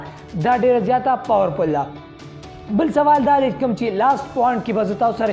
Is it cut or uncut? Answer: uncut